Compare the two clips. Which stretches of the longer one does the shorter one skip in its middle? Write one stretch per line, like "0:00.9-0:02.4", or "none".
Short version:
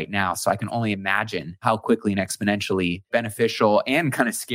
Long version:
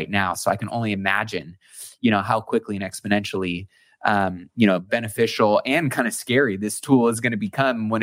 0:01.6-0:02.3
0:03.7-0:04.8